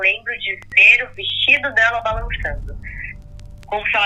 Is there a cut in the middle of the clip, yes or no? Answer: no